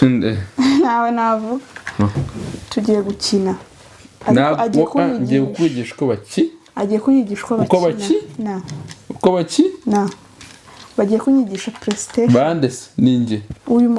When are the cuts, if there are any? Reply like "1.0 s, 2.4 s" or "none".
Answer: 2.1 s